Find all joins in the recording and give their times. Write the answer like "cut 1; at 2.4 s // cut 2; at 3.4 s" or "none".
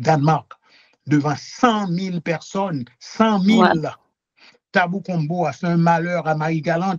none